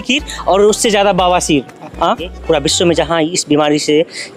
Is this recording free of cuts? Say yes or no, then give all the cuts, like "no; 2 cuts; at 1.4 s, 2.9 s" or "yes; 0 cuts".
no; 1 cut; at 2.3 s